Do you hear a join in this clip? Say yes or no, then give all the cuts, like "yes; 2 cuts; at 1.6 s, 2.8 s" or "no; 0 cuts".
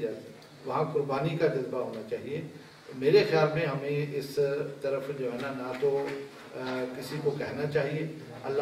no; 0 cuts